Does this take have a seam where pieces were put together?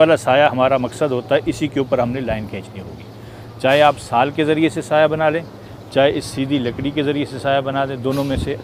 no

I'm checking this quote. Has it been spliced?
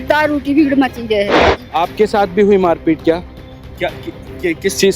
yes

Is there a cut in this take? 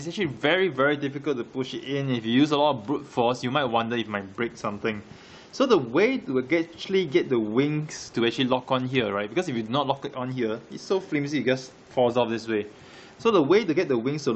no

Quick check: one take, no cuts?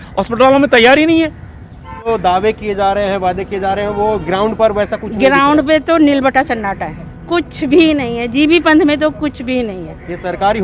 no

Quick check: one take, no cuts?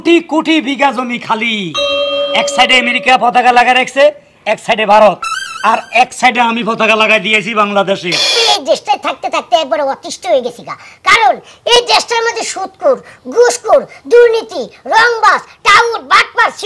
no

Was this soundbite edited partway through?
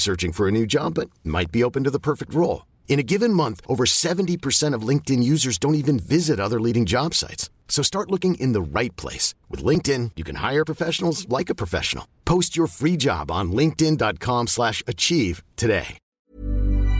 yes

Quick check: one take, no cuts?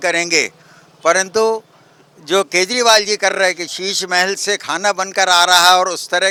yes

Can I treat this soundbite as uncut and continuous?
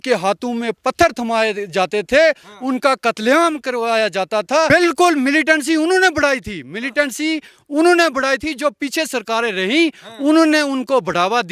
no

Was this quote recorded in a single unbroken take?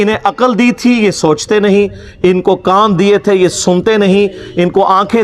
yes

